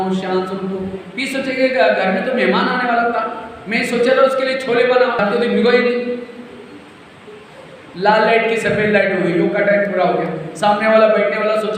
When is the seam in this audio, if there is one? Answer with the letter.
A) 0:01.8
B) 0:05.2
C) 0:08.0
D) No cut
B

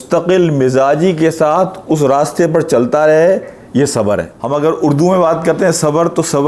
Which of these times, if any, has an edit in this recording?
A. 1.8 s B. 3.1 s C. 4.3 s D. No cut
C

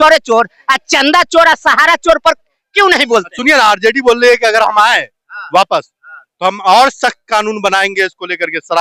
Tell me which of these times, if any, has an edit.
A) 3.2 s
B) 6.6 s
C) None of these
C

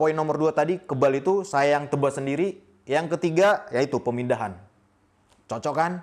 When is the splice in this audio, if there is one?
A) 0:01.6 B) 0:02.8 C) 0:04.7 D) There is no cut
D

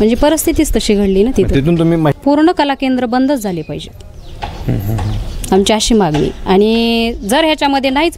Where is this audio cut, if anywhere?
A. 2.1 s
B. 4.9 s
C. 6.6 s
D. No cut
A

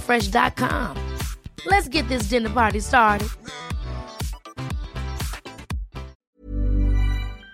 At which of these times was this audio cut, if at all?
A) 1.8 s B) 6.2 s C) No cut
B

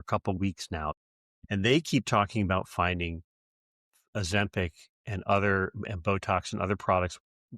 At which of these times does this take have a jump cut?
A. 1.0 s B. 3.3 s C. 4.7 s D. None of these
A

